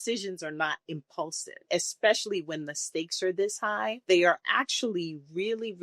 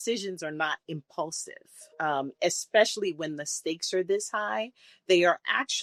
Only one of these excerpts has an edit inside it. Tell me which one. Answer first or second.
first